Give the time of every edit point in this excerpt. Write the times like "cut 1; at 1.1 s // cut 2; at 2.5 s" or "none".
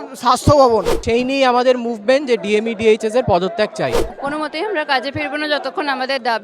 cut 1; at 1.0 s // cut 2; at 4.1 s